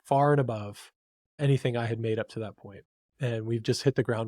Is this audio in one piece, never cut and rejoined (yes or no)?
no